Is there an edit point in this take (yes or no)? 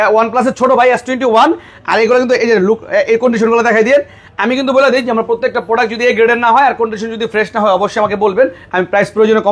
no